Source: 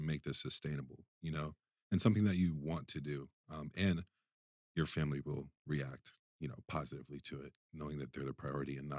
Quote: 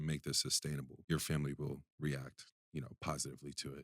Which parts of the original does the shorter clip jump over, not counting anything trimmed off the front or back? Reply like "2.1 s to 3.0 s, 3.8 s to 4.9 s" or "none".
0.9 s to 4.6 s